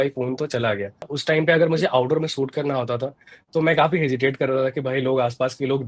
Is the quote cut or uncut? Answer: cut